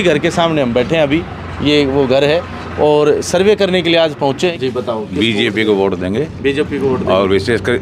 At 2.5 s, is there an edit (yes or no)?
no